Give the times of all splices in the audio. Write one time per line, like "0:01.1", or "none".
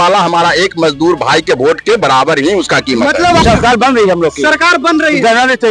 0:03.4

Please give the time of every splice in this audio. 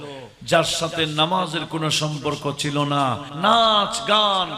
0:03.3

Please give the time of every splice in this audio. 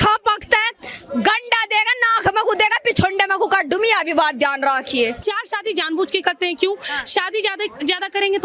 0:05.2

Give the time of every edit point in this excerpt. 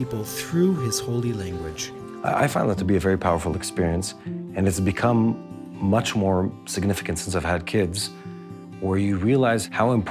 0:02.0

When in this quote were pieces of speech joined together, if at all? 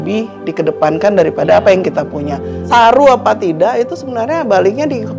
0:02.7

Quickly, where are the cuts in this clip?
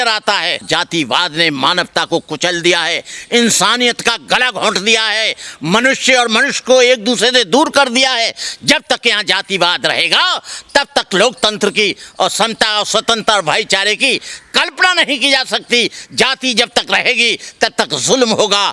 none

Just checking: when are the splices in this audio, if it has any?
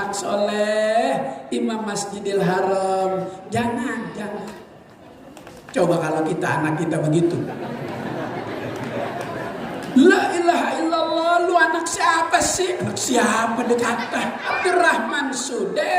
0:14.5

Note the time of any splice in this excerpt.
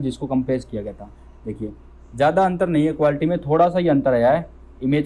none

